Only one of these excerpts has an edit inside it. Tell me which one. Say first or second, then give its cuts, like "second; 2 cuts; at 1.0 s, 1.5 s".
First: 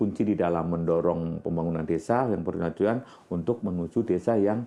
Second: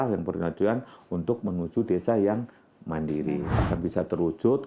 second; 1 cut; at 3.5 s